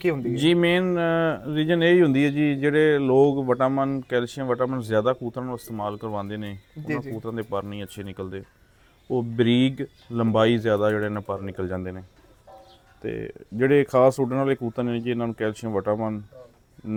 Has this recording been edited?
no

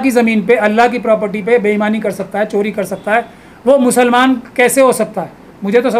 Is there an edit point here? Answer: no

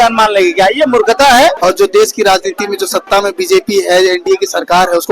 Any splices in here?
yes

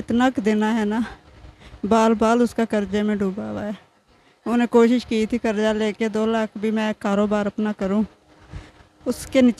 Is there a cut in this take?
no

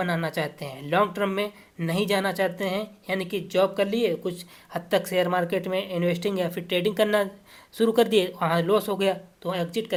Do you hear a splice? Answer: no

